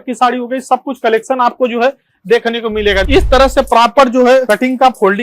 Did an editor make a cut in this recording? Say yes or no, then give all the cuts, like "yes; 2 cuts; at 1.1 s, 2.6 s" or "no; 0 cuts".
yes; 2 cuts; at 3.0 s, 4.4 s